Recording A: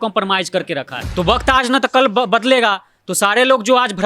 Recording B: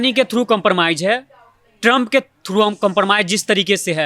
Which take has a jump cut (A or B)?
A